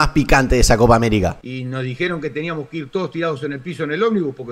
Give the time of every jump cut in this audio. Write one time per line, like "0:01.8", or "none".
0:01.4